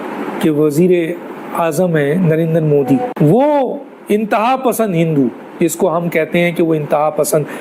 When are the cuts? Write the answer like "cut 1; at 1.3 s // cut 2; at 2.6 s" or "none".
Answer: cut 1; at 3.1 s